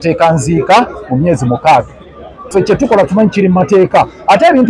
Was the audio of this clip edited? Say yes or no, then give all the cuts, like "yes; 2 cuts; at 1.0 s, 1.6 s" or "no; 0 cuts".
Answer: yes; 1 cut; at 2.4 s